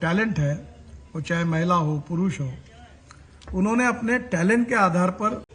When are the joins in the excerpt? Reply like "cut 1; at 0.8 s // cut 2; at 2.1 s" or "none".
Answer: none